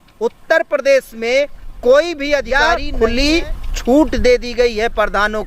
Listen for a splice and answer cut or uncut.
cut